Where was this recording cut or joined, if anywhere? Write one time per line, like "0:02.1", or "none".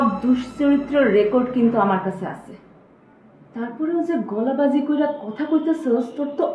none